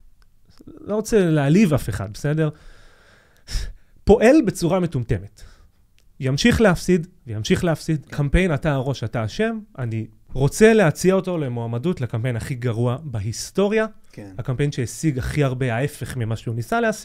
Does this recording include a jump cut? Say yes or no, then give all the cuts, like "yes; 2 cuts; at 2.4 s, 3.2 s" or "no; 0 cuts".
yes; 2 cuts; at 8.1 s, 10.2 s